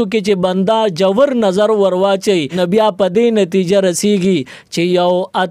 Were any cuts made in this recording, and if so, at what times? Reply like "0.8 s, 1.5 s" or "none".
2.5 s